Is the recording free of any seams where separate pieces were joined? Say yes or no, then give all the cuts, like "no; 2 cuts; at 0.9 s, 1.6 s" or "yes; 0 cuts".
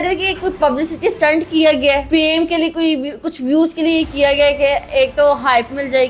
no; 1 cut; at 2.0 s